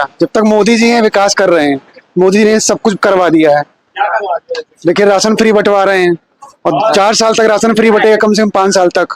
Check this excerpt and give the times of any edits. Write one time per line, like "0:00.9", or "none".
none